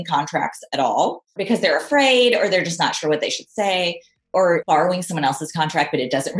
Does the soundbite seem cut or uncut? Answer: cut